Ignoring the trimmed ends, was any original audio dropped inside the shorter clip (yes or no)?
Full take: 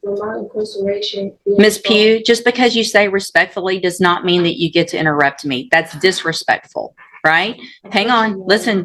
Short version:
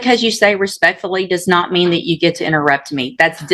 no